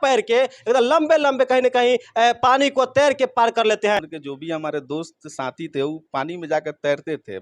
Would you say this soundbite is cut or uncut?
cut